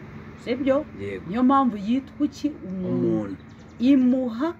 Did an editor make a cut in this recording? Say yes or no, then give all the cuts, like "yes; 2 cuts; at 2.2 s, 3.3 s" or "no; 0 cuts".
no; 0 cuts